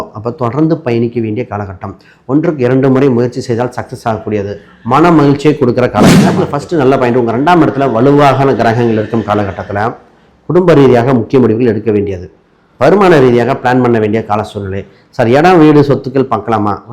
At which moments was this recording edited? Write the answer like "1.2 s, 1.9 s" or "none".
6.4 s